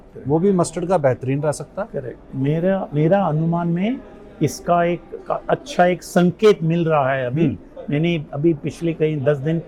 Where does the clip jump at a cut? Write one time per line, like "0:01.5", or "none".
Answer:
none